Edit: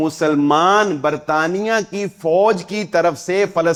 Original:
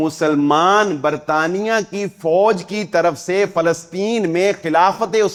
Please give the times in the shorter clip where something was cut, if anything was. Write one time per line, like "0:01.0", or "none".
none